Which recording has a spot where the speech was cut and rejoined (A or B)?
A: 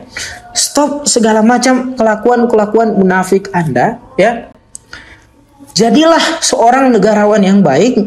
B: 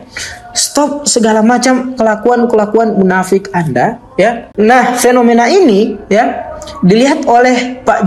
B